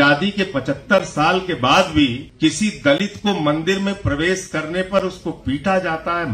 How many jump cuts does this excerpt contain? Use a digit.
1